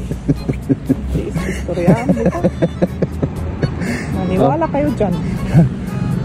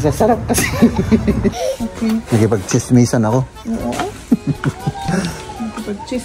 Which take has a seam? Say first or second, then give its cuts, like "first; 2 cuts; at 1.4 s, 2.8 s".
second; 1 cut; at 1.6 s